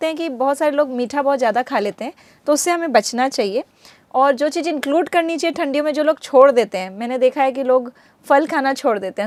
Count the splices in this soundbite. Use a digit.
0